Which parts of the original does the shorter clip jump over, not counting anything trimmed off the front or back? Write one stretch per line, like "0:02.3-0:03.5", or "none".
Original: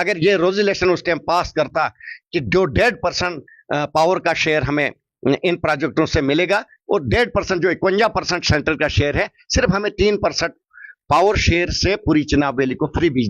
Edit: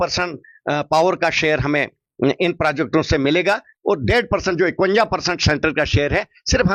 none